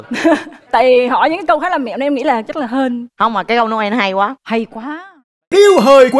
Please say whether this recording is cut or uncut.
cut